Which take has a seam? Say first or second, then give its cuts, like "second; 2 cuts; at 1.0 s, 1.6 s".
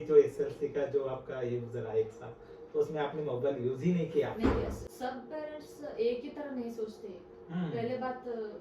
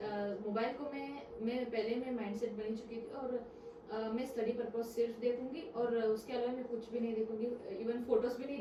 first; 1 cut; at 4.8 s